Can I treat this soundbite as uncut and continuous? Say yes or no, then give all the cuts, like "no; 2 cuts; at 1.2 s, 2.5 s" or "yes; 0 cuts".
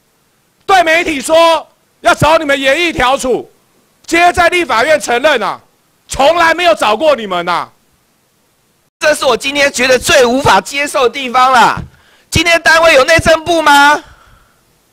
no; 1 cut; at 8.8 s